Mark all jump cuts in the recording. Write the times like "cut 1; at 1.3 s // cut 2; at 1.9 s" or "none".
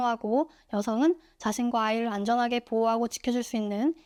none

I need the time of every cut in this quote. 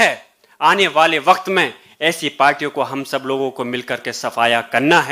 none

